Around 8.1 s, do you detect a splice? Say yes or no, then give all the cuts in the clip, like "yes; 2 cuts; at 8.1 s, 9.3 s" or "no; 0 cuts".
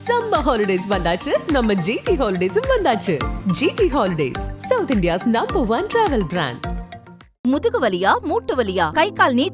no; 0 cuts